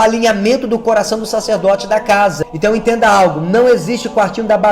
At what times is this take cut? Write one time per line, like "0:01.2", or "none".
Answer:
0:02.4